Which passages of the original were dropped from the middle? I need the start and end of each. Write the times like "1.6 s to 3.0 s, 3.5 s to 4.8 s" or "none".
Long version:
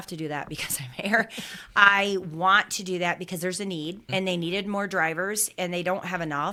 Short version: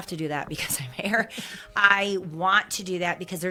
none